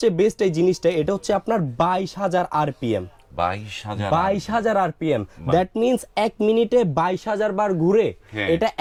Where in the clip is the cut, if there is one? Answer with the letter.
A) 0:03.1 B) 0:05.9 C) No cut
C